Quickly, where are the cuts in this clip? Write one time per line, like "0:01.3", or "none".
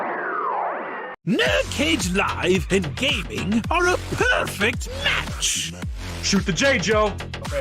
0:01.1